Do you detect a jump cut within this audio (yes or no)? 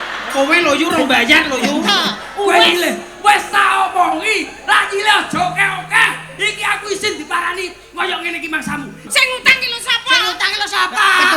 yes